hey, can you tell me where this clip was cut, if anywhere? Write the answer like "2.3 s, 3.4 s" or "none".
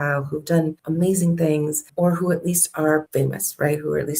0.8 s, 1.8 s, 3.1 s